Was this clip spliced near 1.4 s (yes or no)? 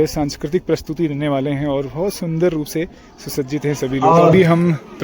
no